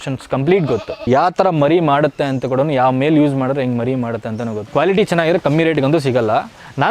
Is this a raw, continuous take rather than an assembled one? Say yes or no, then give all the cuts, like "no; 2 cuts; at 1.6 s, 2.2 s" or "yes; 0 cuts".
no; 2 cuts; at 1.1 s, 4.6 s